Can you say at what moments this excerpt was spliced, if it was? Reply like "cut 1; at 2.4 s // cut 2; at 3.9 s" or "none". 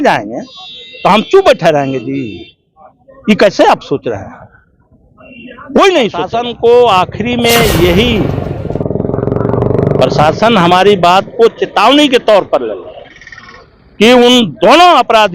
cut 1; at 6.4 s